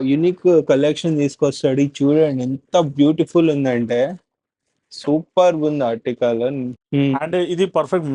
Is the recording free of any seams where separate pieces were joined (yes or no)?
no